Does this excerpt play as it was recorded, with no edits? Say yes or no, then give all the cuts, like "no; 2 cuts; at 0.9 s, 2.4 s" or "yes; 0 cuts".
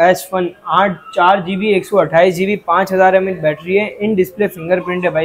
yes; 0 cuts